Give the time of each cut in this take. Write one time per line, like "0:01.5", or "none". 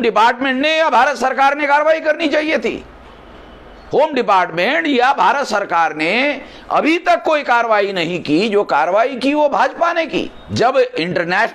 0:10.4